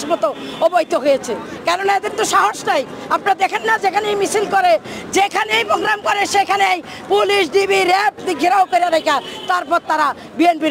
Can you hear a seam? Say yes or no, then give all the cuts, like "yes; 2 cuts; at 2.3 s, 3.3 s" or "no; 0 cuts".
no; 0 cuts